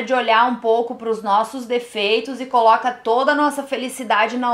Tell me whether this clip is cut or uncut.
uncut